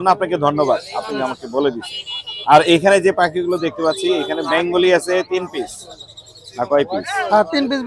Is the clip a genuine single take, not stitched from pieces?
yes; 0 cuts

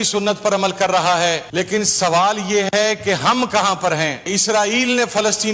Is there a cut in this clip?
yes; 2 cuts; at 1.5 s, 4.3 s

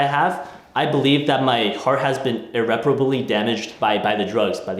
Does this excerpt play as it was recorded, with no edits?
no; 1 cut; at 3.7 s

